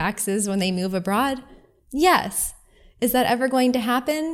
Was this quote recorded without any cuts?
yes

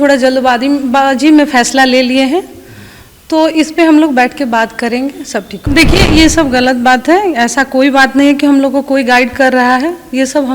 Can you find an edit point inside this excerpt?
yes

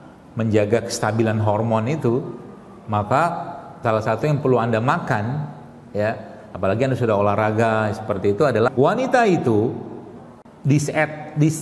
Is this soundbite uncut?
no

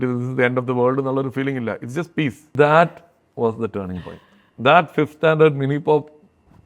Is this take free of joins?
no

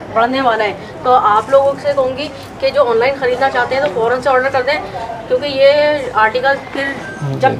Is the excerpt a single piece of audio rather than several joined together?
yes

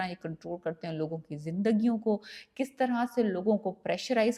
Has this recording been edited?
no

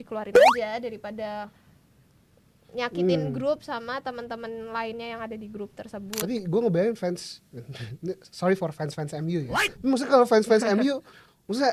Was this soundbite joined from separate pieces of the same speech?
yes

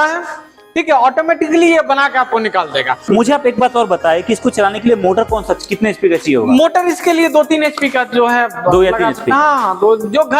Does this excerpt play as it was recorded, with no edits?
no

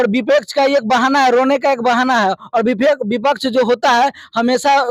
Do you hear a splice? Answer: no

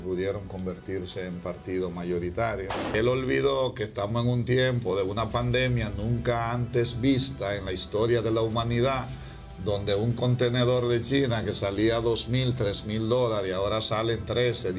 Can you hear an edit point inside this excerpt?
yes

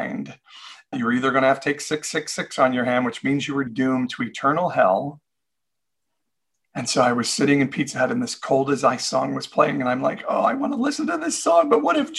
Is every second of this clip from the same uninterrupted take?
no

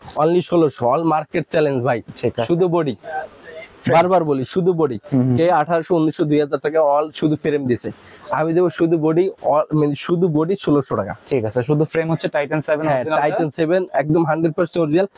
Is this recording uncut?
yes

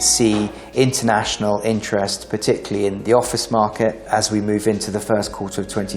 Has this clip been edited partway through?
yes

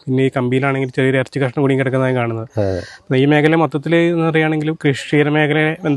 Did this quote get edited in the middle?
no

